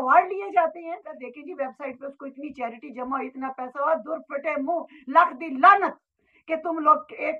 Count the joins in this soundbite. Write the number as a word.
one